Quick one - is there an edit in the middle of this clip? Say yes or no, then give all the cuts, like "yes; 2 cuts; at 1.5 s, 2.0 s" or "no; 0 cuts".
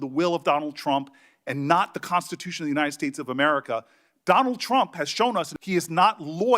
yes; 1 cut; at 5.6 s